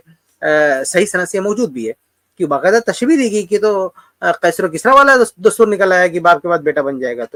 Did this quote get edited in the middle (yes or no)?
no